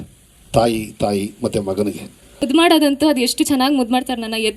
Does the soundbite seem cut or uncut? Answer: cut